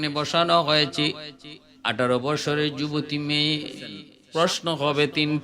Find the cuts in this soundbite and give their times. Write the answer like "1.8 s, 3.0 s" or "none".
4.1 s